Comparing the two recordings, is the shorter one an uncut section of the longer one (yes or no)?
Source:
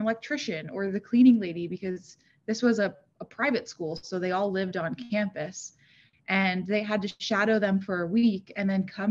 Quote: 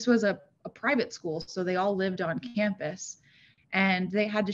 yes